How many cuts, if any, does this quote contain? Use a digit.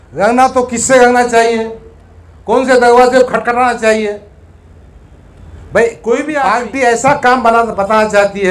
1